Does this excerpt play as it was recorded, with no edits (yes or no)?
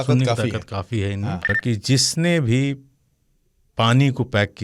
no